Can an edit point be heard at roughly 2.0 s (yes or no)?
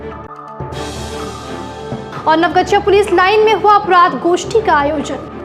yes